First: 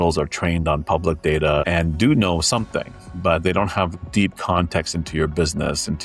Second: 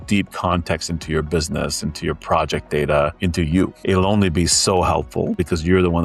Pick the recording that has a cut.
second; 1 cut; at 3.6 s

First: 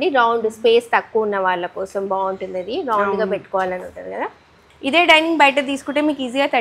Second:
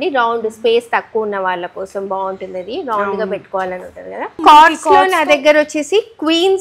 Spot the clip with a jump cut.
second; 1 cut; at 4.4 s

